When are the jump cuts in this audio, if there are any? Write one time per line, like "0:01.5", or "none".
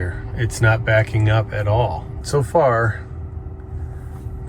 0:02.2